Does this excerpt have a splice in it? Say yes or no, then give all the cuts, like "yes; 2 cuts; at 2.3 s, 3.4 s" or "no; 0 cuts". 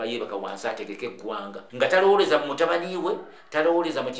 yes; 1 cut; at 1.6 s